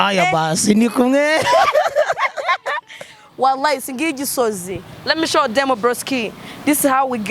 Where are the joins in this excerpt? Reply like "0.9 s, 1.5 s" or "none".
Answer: 3.3 s